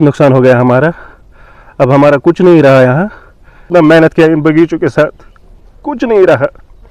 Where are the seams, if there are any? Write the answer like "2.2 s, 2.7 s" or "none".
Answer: 3.7 s